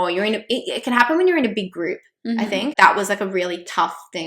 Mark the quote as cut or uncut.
cut